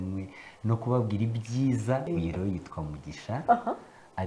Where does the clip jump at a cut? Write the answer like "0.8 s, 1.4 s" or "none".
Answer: 2.1 s

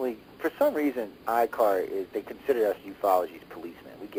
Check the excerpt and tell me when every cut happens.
none

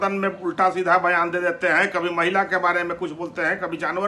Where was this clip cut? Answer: none

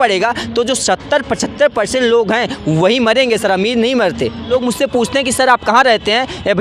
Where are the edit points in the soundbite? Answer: 4.6 s

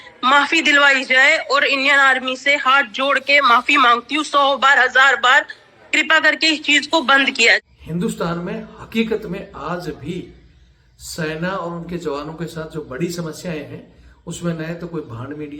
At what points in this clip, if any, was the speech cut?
7.7 s

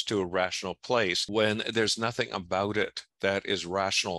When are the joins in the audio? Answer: 1.2 s

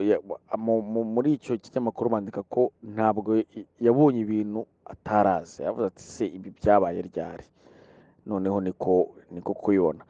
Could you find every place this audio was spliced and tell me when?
none

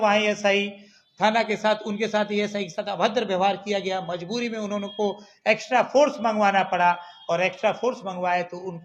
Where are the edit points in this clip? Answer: none

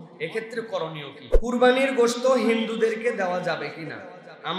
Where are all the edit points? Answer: 1.2 s

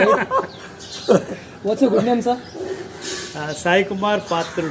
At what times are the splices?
none

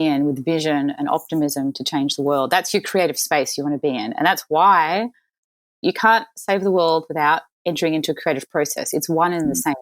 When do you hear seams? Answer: 5.8 s

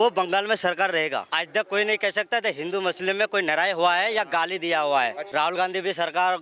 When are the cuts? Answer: 1.3 s, 5.2 s

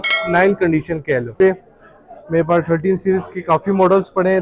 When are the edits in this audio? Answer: 1.3 s

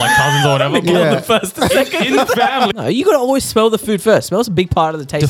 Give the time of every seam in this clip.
2.7 s

